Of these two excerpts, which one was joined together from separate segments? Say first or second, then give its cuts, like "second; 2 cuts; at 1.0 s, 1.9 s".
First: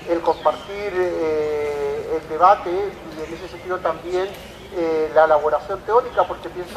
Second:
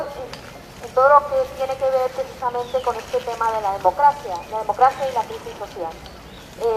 first; 1 cut; at 5.1 s